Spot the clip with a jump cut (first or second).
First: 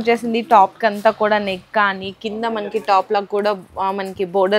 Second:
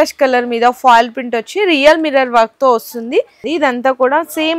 second